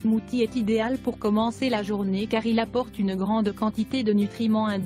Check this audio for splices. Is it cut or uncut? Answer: cut